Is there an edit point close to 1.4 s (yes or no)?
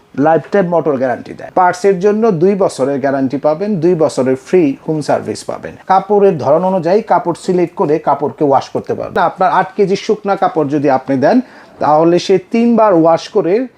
yes